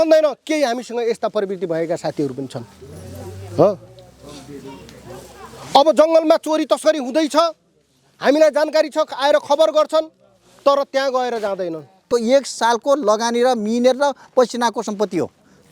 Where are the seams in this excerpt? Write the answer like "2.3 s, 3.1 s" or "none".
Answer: 12.0 s